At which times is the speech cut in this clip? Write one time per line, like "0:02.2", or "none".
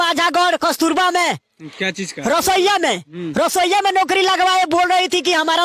none